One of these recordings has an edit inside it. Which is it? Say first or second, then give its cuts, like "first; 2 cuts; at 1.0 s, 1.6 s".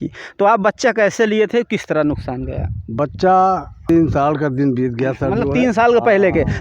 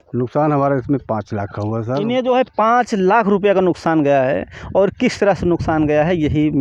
first; 1 cut; at 3.9 s